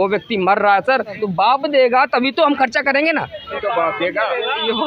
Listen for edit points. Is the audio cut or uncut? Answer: cut